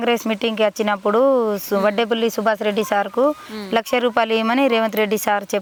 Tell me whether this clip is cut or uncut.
uncut